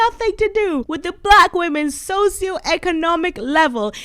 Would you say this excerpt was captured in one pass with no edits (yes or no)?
no